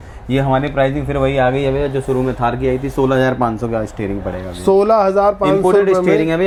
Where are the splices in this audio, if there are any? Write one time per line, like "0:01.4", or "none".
none